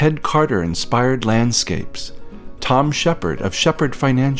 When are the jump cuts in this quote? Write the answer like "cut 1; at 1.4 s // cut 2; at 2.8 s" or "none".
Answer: none